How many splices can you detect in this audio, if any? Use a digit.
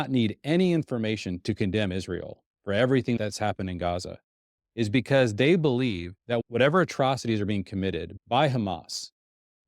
4